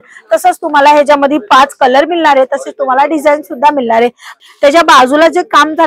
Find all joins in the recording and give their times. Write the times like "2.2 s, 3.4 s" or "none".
4.4 s

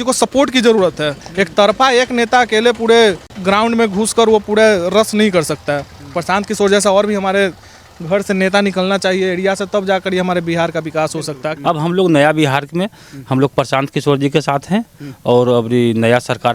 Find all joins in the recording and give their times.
3.3 s, 11.5 s

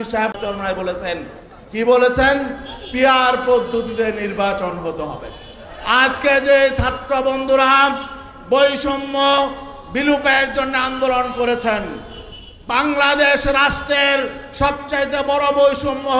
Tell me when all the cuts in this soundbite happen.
none

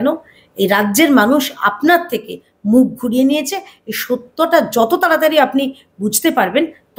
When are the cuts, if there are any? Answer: none

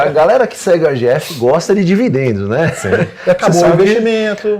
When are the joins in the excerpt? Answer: none

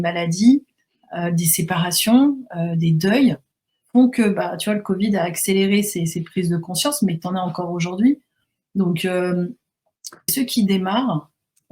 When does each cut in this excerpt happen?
10.3 s

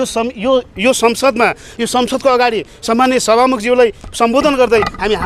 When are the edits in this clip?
none

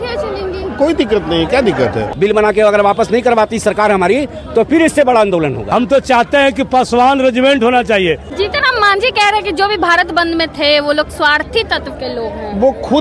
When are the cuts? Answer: 2.1 s, 5.6 s, 8.3 s

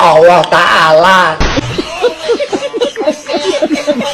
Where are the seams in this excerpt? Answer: 1.3 s

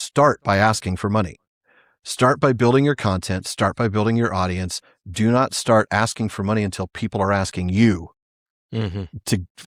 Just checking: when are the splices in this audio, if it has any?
none

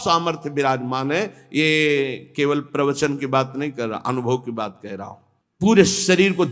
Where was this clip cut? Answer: none

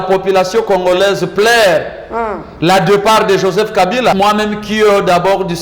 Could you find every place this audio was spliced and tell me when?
4.1 s

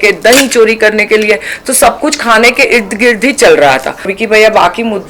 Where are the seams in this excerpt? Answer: 4.1 s

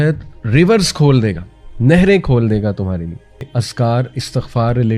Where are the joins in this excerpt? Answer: 3.5 s

